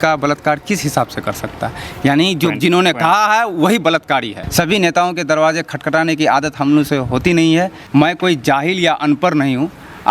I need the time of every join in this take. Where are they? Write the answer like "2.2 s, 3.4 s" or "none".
4.4 s, 7.8 s